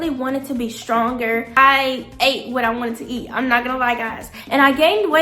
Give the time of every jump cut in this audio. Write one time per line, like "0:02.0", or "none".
0:01.6
0:04.4